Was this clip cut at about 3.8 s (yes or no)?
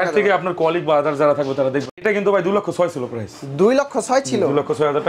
no